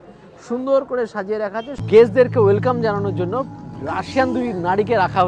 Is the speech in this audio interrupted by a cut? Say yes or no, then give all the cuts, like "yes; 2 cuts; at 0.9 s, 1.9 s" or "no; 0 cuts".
yes; 1 cut; at 1.7 s